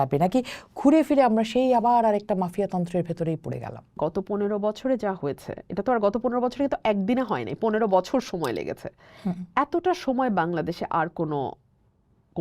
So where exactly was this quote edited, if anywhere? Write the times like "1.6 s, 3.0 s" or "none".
3.9 s

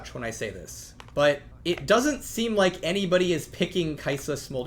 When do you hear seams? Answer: none

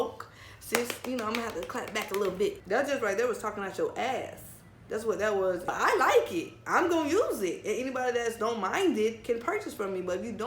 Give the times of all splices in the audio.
2.6 s, 5.7 s

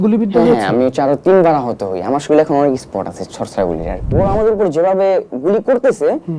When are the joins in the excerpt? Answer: 4.1 s

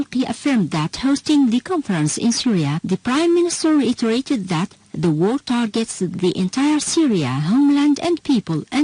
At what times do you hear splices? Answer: 4.8 s

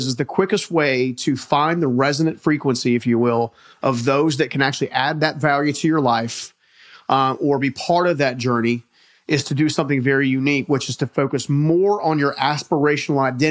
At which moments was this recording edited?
none

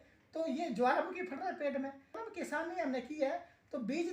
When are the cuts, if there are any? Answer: 2.2 s

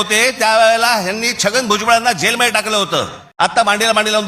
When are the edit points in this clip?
3.2 s

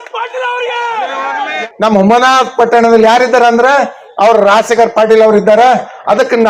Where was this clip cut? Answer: 1.7 s

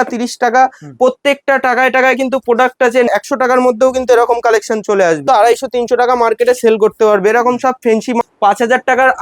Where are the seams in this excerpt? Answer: 3.1 s, 5.2 s, 8.2 s

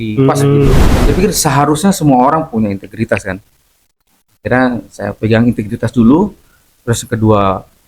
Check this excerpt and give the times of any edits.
1.0 s

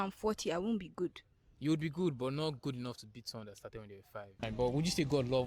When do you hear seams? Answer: 4.4 s

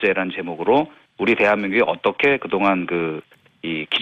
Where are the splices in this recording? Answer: 2.3 s

